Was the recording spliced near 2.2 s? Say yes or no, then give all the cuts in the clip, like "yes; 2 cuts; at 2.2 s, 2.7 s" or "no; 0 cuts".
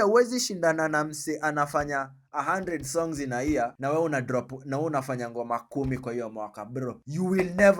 no; 0 cuts